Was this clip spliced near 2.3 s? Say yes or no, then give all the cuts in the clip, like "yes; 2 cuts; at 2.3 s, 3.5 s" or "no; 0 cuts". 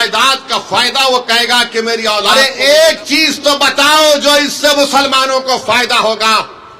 yes; 1 cut; at 2.3 s